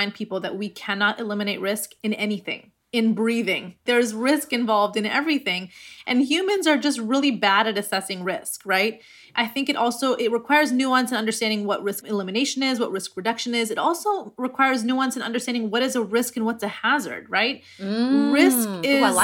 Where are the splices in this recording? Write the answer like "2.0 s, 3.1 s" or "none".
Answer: 3.8 s, 12.0 s